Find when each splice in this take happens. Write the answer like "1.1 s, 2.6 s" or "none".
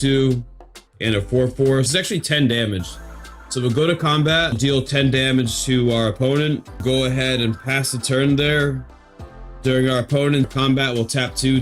1.9 s, 4.6 s, 6.8 s, 10.5 s